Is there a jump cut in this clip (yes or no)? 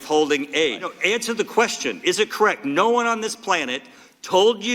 yes